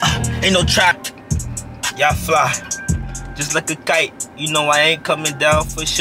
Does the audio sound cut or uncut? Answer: cut